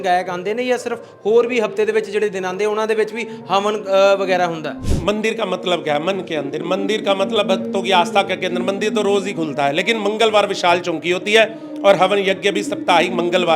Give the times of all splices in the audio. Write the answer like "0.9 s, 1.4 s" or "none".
4.9 s

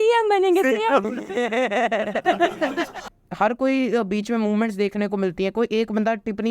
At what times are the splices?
3.0 s

